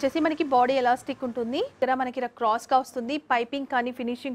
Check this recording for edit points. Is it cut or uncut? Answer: cut